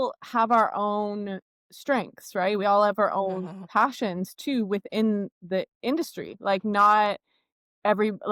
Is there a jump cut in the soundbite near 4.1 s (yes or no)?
no